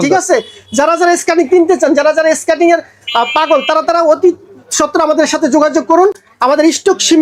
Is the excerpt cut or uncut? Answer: uncut